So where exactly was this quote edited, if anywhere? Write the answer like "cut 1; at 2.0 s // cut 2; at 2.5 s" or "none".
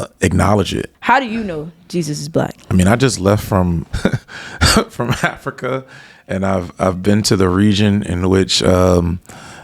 cut 1; at 0.9 s // cut 2; at 3.9 s